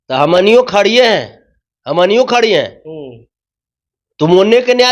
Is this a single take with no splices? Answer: yes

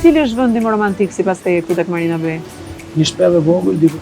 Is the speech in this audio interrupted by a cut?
yes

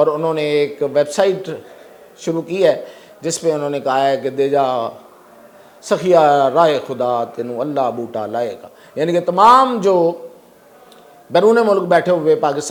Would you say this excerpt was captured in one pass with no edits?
yes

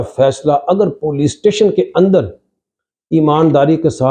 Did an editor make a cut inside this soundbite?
no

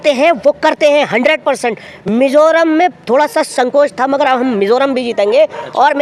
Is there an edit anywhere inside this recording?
no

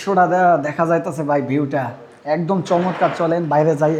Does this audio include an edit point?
no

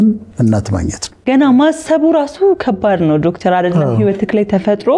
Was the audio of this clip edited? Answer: yes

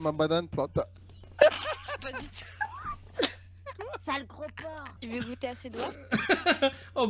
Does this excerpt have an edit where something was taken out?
yes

